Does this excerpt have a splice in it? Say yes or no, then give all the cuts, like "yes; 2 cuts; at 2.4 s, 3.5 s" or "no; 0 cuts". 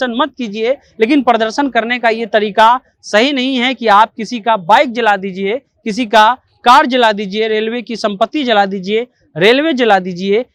no; 0 cuts